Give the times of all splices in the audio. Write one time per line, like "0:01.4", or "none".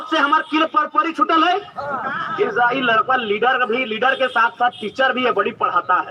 none

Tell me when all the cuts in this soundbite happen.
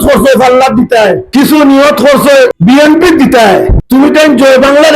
0:01.2
0:02.6
0:03.8

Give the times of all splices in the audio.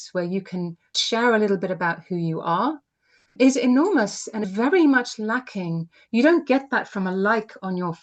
0:01.0
0:03.3
0:04.4

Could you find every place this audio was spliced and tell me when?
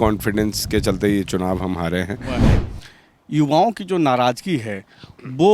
0:02.5

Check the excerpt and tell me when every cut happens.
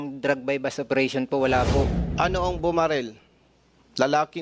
0:02.0

